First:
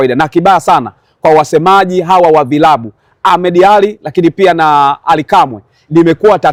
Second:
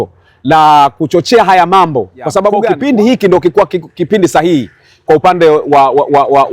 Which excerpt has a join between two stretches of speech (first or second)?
second